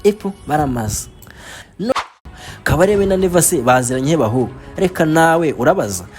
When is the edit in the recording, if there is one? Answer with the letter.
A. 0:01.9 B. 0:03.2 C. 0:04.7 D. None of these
A